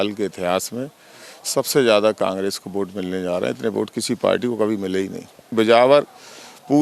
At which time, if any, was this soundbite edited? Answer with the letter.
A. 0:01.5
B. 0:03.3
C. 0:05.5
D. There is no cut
C